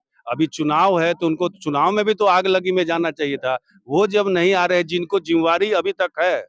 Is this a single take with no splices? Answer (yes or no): yes